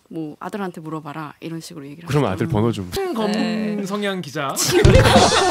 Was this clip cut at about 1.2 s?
no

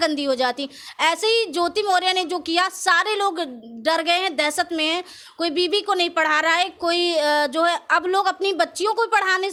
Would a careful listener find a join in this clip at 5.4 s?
no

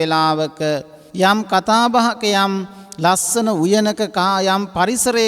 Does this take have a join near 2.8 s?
no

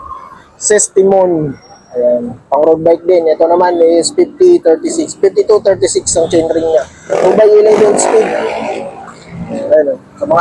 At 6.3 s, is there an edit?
no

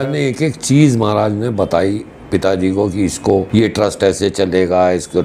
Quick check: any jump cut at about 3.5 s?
yes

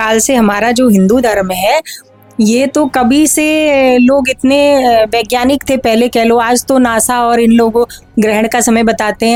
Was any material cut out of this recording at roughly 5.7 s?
no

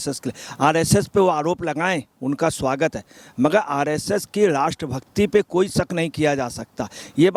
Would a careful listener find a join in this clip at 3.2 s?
no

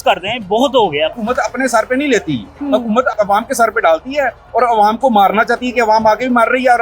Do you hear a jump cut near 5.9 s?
no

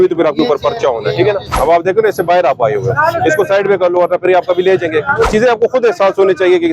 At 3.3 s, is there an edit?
no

